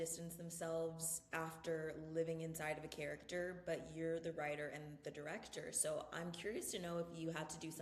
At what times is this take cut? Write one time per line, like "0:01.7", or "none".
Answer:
none

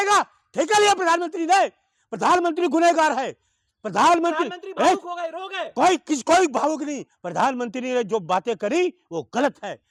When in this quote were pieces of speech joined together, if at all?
none

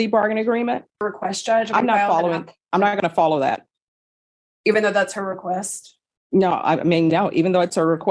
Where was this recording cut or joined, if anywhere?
0:01.0

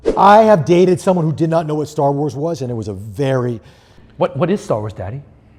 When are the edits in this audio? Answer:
none

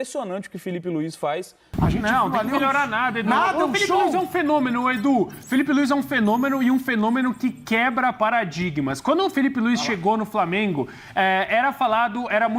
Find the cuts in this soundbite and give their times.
0:01.6

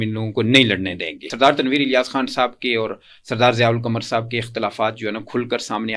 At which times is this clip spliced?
0:01.2

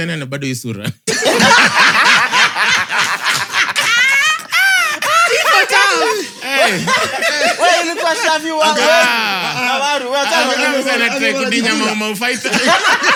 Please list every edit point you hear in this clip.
none

